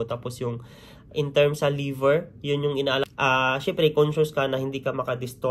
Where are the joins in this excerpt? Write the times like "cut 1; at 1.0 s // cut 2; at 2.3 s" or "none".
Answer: cut 1; at 3.1 s